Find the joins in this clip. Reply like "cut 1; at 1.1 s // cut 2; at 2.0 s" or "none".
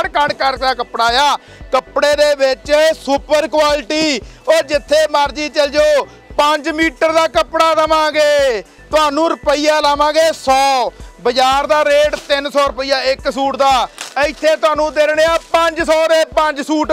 none